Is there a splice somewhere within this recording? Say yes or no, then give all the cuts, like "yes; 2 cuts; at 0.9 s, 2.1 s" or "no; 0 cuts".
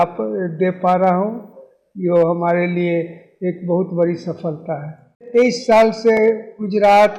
no; 0 cuts